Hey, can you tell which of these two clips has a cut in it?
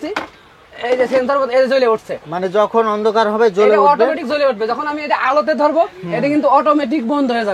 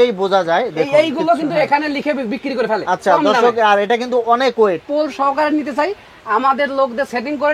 second; 1 cut; at 4.8 s

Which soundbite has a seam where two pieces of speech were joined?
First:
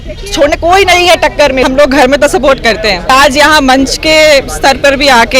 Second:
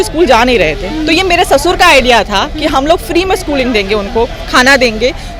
first; 2 cuts; at 1.6 s, 3.1 s

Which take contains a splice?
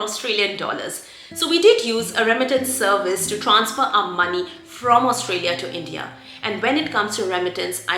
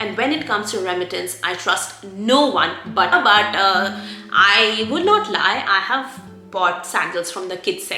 second; 1 cut; at 3.1 s

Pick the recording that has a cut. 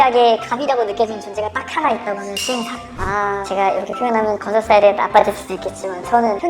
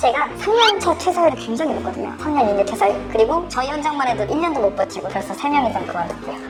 first; 1 cut; at 3.0 s

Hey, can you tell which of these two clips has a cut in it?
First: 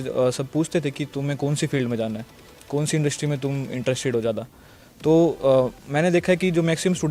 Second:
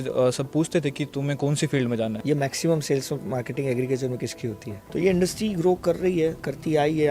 second; 2 cuts; at 2.2 s, 4.7 s

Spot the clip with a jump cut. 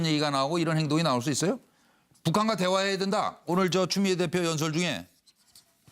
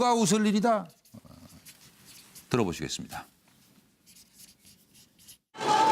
first; 1 cut; at 3.3 s

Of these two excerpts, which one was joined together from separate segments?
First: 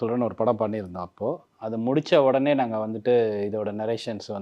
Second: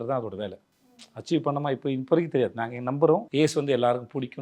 second; 1 cut; at 3.3 s

